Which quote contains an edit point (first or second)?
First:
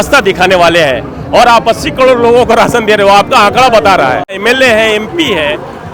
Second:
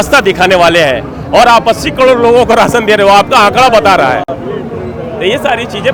first